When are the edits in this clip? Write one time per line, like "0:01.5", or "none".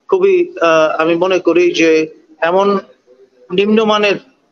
none